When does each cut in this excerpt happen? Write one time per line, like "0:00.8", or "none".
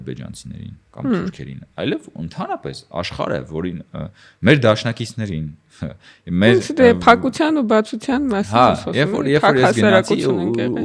none